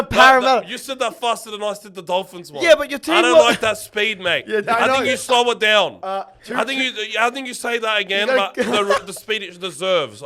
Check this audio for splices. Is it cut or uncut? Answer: uncut